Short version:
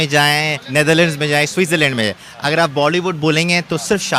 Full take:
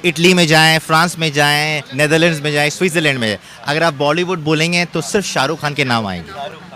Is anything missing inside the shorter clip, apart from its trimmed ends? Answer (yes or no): no